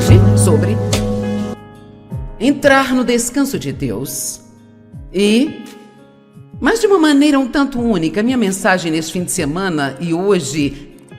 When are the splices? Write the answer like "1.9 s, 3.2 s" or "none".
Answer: 1.5 s